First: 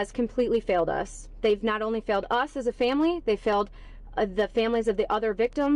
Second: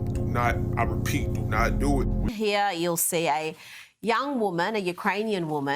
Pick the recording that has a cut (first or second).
second